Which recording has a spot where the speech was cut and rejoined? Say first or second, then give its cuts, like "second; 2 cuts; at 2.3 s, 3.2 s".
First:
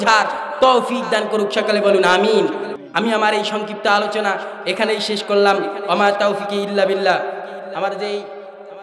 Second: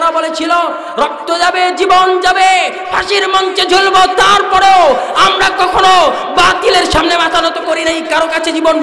first; 1 cut; at 2.7 s